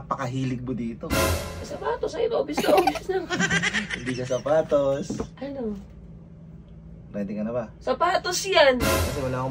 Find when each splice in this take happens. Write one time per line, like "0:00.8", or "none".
none